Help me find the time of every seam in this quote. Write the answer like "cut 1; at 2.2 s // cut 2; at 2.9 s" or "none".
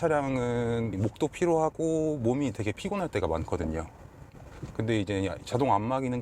cut 1; at 0.9 s